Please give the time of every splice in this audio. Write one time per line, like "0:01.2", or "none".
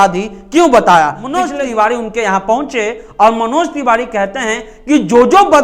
0:01.4